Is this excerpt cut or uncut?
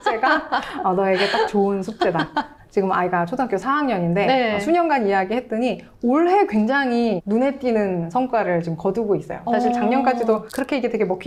uncut